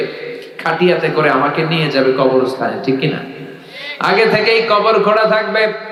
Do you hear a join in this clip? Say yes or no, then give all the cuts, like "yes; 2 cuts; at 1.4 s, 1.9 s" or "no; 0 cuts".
no; 0 cuts